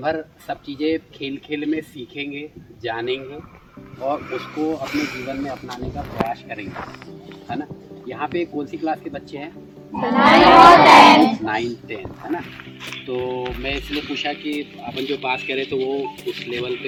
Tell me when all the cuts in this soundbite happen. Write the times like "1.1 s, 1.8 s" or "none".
none